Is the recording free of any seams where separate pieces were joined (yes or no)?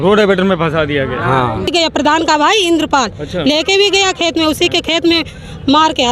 no